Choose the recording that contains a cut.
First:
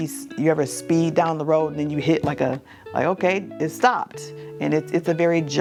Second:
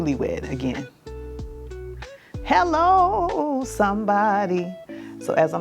second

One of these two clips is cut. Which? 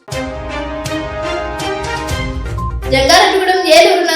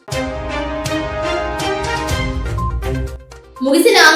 first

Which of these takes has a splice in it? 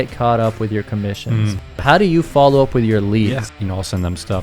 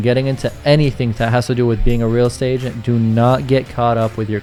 first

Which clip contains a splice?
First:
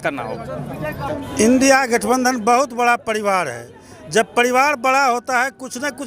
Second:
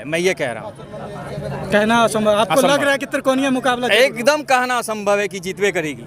first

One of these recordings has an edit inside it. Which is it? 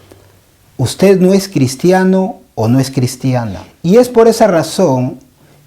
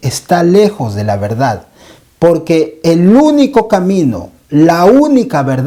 first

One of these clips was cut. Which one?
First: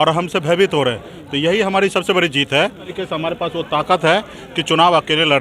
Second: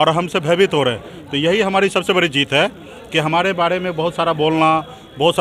first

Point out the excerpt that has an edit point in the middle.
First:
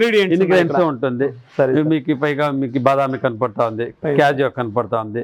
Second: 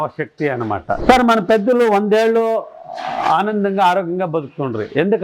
second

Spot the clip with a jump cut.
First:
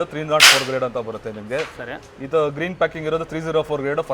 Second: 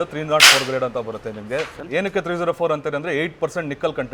second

